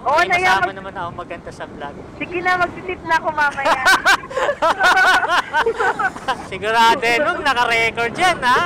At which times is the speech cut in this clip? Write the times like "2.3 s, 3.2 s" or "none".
6.5 s